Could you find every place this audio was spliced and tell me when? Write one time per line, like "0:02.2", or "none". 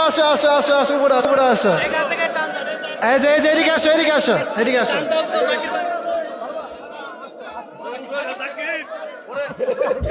0:01.3